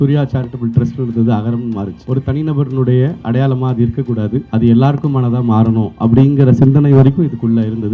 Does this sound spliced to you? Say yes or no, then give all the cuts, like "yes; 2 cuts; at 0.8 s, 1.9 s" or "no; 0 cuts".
no; 0 cuts